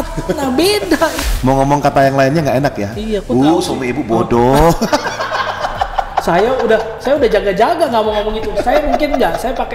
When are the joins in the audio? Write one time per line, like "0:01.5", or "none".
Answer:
0:01.2